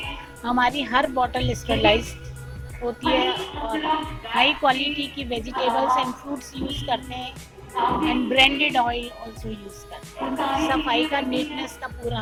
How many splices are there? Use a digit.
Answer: 0